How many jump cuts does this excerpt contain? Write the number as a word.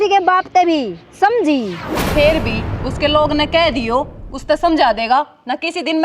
one